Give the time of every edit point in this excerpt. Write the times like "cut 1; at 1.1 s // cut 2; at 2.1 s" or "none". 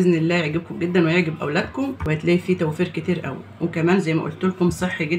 cut 1; at 2.0 s